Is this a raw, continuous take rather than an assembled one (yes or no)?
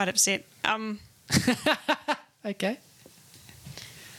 yes